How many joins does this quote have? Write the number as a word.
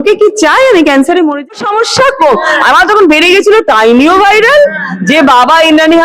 one